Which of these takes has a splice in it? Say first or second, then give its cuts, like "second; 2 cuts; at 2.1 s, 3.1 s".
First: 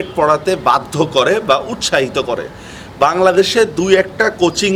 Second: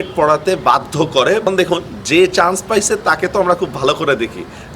second; 1 cut; at 1.5 s